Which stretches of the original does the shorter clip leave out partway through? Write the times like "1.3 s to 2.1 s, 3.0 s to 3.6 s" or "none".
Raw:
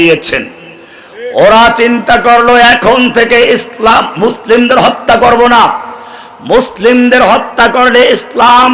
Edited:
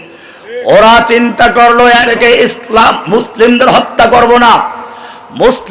2.8 s to 3.2 s